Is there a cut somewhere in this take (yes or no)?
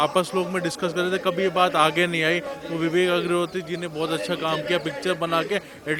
no